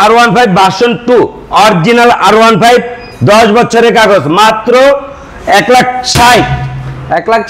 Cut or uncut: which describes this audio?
uncut